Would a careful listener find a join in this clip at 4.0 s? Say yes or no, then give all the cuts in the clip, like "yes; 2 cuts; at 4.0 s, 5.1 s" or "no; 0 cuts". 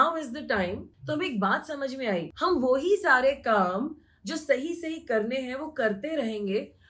no; 2 cuts; at 0.9 s, 2.3 s